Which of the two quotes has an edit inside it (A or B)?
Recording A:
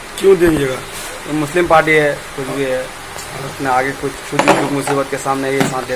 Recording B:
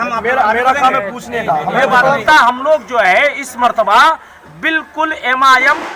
B